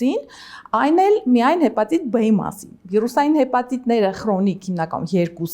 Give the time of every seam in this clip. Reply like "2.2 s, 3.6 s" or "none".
none